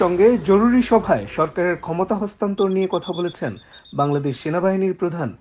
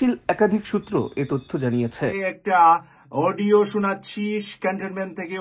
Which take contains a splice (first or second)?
second